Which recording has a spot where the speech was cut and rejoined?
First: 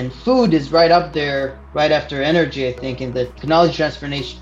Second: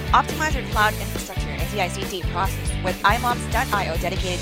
first; 1 cut; at 3.4 s

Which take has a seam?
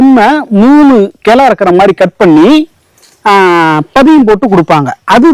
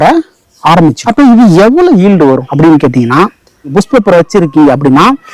second; 3 cuts; at 1.0 s, 2.5 s, 3.7 s

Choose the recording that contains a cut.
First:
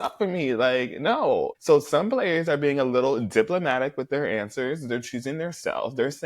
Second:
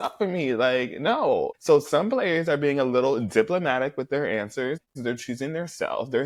first; 1 cut; at 4.8 s

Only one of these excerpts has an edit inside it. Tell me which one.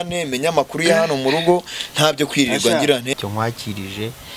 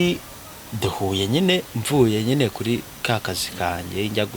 first; 1 cut; at 3.1 s

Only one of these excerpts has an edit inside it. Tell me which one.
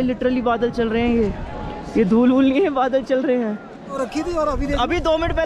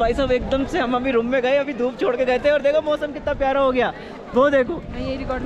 first; 1 cut; at 4.0 s

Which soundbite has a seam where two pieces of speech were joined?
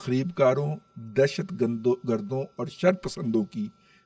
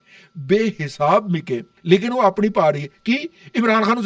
second; 1 cut; at 1.7 s

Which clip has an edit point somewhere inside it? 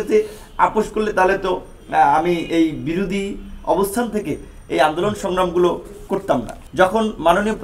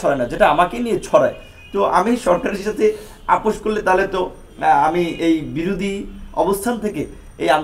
first; 1 cut; at 6.6 s

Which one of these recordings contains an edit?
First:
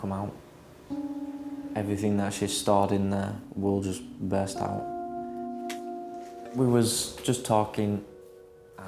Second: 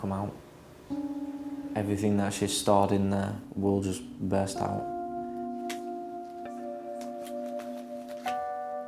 first; 1 cut; at 6.4 s

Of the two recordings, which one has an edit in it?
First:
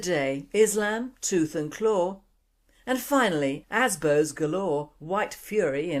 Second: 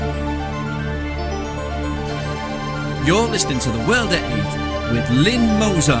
first; 1 cut; at 4.9 s

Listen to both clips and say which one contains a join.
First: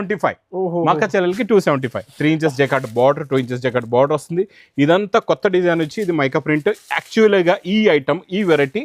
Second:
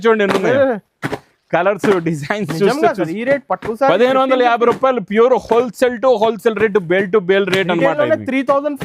first; 1 cut; at 2.1 s

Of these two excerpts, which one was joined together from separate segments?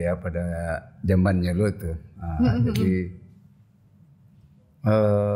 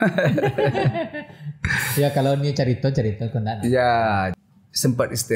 second; 1 cut; at 4.4 s

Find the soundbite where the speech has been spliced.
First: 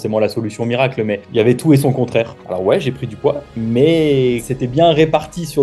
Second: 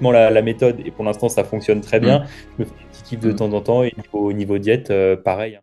first; 2 cuts; at 2.4 s, 4.5 s

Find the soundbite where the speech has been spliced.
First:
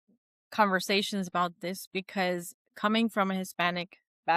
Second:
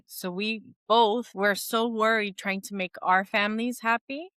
second; 1 cut; at 1.3 s

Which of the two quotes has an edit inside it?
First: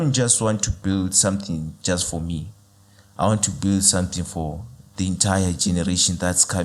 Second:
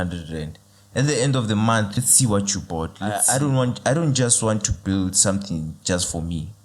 second; 2 cuts; at 2.0 s, 3.1 s

